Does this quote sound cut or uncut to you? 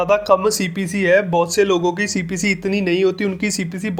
uncut